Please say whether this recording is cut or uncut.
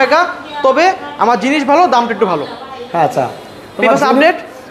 uncut